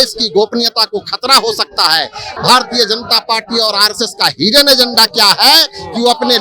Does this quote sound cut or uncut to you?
cut